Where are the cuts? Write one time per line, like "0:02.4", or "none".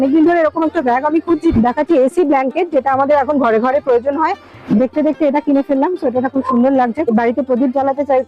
0:01.5
0:04.5
0:07.1